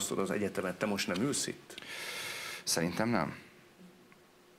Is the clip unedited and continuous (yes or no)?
yes